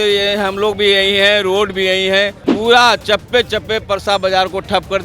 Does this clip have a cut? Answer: yes; 1 cut; at 2.4 s

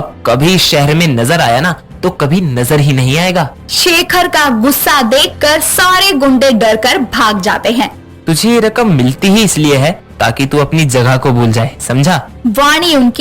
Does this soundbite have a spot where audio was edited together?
yes; 1 cut; at 8.2 s

